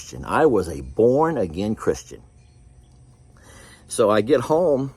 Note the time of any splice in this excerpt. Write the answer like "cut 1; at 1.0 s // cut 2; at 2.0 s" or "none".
cut 1; at 2.2 s